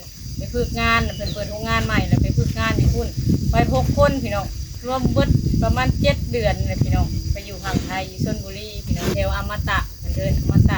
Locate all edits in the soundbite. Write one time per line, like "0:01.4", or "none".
0:04.8
0:09.1